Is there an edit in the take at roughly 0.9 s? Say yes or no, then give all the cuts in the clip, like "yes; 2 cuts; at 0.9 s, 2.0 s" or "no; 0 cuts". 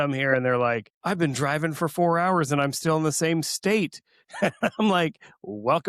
yes; 1 cut; at 0.9 s